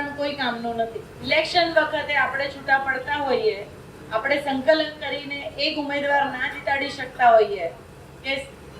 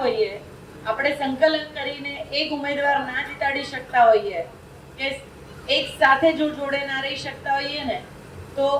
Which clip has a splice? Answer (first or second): first